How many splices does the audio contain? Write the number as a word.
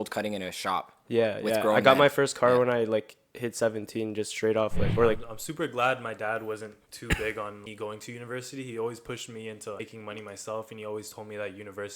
three